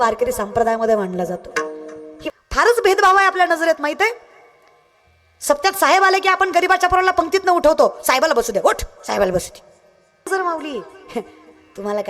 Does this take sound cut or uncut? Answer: cut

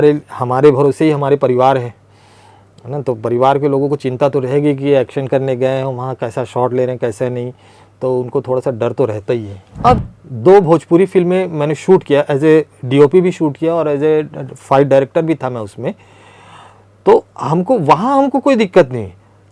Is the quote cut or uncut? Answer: cut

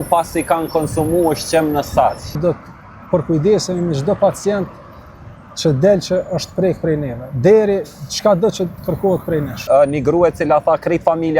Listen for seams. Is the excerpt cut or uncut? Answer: cut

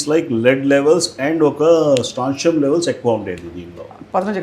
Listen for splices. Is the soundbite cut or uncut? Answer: uncut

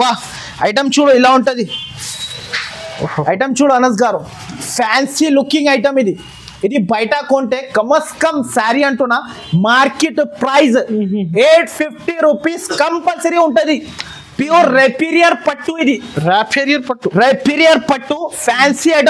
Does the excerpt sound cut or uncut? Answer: uncut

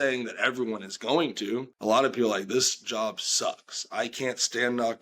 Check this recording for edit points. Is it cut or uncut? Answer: cut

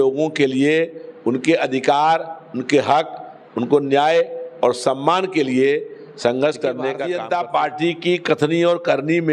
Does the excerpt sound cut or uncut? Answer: cut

